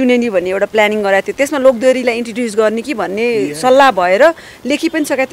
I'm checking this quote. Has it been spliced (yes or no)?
no